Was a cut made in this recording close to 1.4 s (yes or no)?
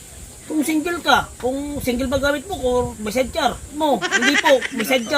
no